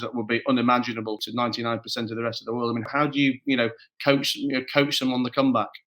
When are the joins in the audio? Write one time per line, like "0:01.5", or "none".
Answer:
0:01.2
0:02.9